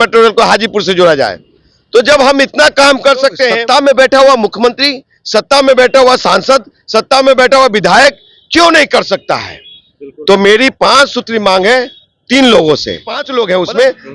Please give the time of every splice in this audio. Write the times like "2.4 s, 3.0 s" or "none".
3.6 s, 13.2 s